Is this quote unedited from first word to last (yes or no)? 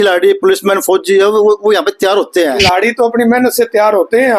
no